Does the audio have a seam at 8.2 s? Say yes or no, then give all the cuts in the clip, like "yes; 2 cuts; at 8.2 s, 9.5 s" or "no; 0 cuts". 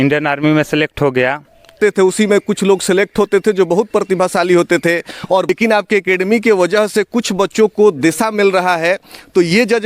no; 2 cuts; at 1.7 s, 5.5 s